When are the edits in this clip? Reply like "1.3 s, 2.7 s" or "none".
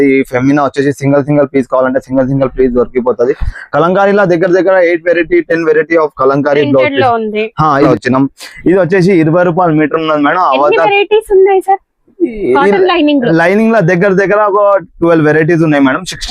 7.9 s